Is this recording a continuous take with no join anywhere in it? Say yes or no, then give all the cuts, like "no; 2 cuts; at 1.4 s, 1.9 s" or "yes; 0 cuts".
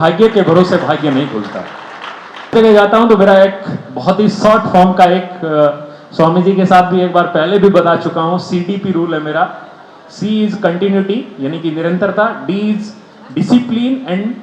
no; 1 cut; at 2.5 s